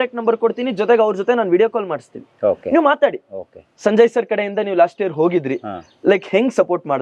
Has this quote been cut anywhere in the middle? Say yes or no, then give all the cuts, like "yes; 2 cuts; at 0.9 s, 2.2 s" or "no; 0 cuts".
no; 0 cuts